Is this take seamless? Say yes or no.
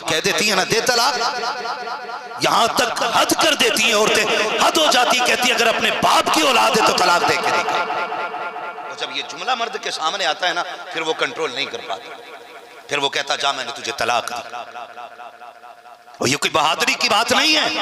yes